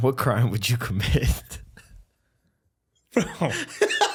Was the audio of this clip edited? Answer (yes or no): no